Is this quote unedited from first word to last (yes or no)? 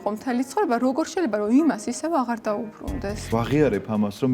no